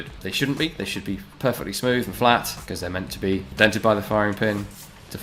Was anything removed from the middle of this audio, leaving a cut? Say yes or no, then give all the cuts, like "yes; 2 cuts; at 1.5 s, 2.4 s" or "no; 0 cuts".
yes; 1 cut; at 3.5 s